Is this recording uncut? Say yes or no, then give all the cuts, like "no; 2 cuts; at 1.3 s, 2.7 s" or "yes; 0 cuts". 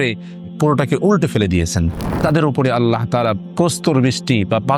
no; 1 cut; at 2.0 s